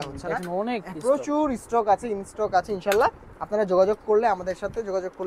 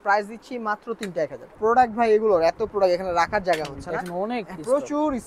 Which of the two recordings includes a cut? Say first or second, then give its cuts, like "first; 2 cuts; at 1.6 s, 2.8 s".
second; 1 cut; at 1.6 s